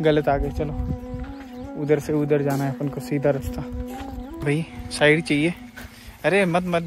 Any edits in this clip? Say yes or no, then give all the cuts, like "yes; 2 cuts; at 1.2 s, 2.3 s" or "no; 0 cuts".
yes; 1 cut; at 4.4 s